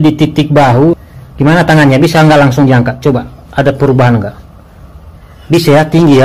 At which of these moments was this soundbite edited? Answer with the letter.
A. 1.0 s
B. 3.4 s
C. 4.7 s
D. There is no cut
A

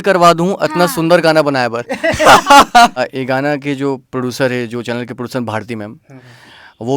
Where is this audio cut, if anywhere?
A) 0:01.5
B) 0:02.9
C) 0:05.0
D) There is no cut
B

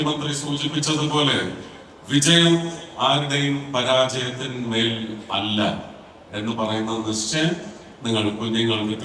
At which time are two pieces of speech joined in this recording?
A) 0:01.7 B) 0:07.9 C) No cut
C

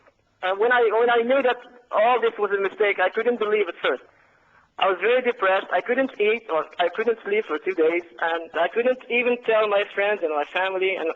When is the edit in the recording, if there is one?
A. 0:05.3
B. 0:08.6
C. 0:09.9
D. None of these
B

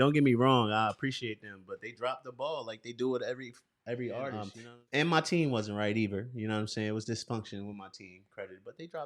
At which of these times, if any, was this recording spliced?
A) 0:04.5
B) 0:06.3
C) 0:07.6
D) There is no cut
A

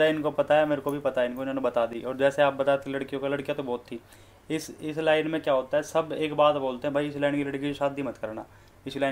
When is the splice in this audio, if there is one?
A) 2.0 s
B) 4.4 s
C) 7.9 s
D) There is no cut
D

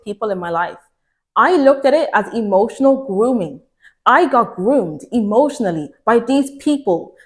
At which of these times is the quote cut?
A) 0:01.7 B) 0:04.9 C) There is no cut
C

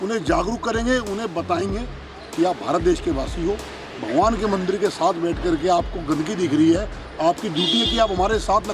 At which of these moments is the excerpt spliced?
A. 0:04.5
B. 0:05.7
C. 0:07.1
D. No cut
D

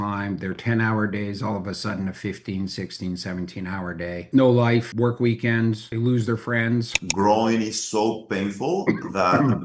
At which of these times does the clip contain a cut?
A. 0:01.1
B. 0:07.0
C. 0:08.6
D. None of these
B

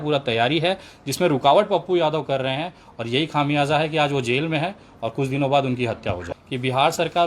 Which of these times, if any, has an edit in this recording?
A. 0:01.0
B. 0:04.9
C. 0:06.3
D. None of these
C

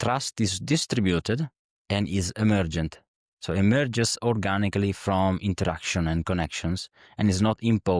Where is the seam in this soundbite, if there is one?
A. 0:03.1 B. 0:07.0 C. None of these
C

